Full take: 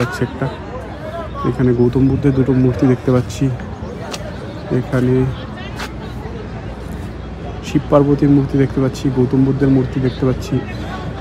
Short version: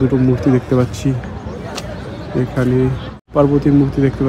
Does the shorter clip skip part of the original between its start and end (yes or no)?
yes